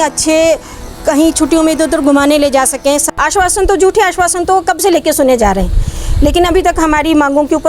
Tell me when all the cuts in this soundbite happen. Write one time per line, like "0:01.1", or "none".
0:03.1